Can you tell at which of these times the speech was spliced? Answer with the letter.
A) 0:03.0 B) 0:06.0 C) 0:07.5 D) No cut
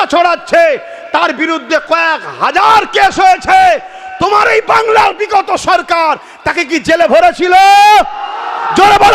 D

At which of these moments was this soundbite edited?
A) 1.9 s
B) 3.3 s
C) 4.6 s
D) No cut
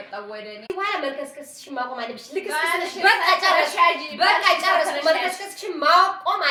D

